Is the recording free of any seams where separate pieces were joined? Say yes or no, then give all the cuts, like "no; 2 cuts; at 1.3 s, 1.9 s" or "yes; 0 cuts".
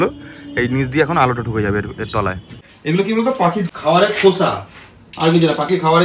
no; 2 cuts; at 2.4 s, 3.7 s